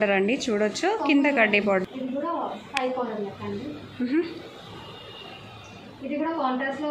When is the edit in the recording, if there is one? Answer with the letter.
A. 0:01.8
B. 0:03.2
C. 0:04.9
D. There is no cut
A